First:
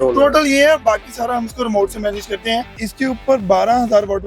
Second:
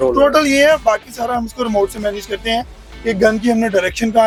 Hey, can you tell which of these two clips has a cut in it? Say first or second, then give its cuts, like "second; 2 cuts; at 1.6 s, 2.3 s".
first; 1 cut; at 2.8 s